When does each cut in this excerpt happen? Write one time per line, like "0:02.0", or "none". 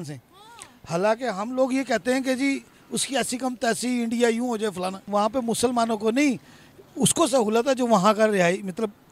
0:05.0